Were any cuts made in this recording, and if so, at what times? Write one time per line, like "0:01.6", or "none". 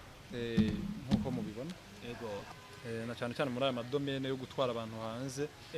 0:02.5

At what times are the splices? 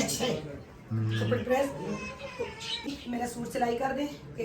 0:02.9

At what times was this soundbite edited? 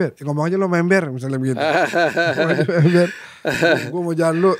none

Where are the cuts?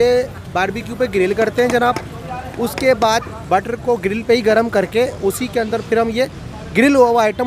none

